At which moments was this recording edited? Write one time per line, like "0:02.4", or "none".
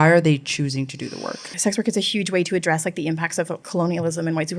0:01.5
0:03.6

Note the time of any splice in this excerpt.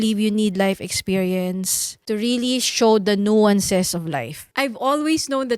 0:04.5

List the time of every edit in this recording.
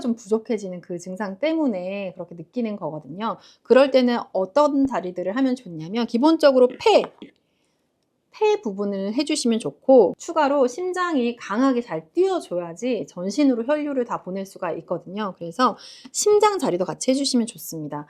none

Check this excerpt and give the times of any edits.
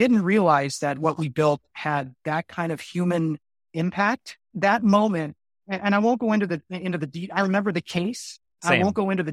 0:04.5

